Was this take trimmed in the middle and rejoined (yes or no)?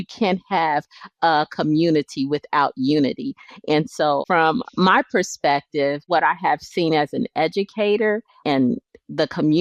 yes